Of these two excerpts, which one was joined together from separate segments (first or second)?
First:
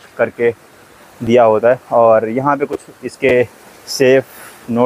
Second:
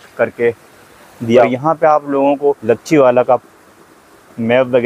second